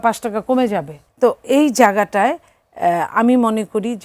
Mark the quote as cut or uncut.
cut